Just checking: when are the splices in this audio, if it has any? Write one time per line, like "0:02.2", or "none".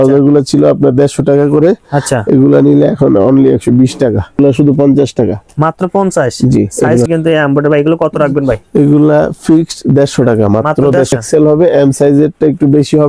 0:04.4
0:07.1
0:11.1